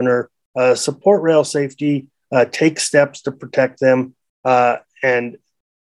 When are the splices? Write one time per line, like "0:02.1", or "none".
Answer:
none